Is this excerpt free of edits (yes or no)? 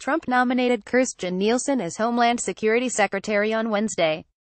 yes